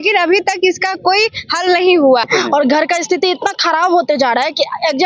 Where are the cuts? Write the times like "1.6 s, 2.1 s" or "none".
2.3 s